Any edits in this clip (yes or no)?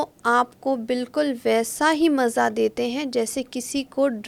no